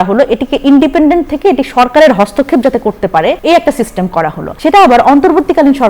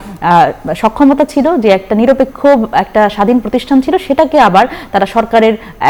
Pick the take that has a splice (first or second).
first